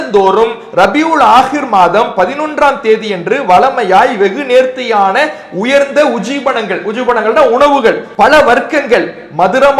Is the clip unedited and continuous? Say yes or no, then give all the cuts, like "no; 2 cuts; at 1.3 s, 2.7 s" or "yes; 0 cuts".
yes; 0 cuts